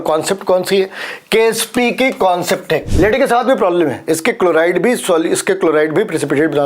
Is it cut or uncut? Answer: cut